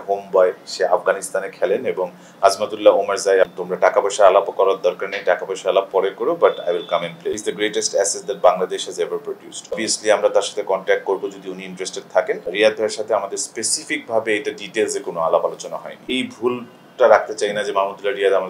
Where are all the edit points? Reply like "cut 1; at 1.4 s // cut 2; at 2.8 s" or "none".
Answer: cut 1; at 3.6 s // cut 2; at 7.4 s // cut 3; at 9.8 s // cut 4; at 12.5 s // cut 5; at 16.0 s

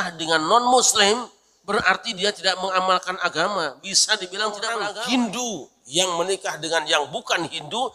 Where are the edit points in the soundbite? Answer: cut 1; at 4.9 s

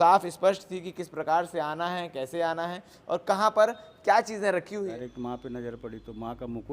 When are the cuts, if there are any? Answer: cut 1; at 4.8 s

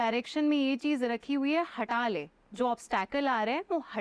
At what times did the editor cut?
none

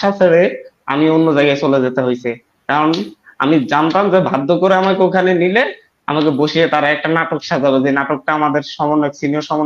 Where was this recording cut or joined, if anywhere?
none

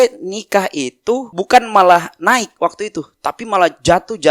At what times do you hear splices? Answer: cut 1; at 1.3 s

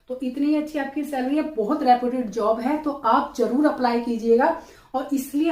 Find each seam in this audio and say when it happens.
none

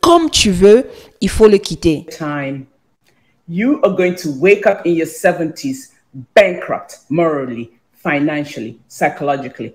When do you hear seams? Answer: cut 1; at 2.2 s

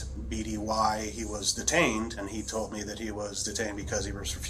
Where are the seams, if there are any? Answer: cut 1; at 2.2 s

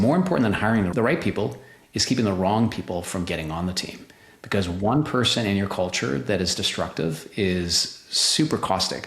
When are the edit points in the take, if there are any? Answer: cut 1; at 0.9 s

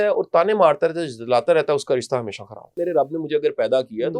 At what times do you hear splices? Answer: cut 1; at 2.8 s

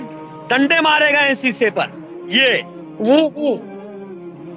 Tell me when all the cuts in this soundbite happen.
cut 1; at 3.6 s

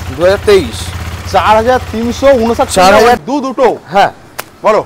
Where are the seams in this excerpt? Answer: cut 1; at 3.2 s

